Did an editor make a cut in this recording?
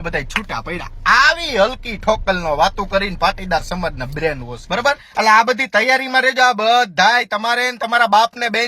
yes; 1 cut; at 4.5 s

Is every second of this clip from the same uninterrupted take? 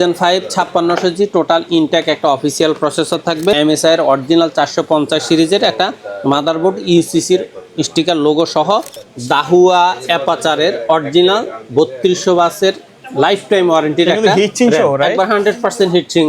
no; 2 cuts; at 3.6 s, 9.0 s

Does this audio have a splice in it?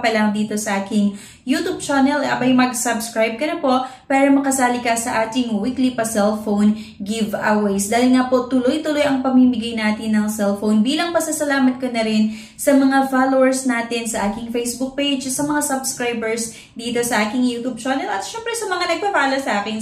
no; 0 cuts

